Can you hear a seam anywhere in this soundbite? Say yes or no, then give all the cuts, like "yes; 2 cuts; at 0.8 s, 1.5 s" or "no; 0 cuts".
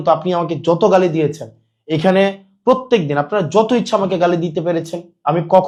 no; 0 cuts